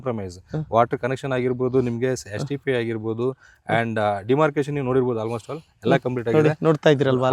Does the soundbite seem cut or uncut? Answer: uncut